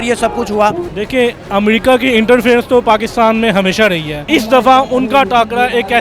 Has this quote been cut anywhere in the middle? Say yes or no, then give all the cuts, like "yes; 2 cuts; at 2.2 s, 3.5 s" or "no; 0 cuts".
yes; 2 cuts; at 0.9 s, 4.2 s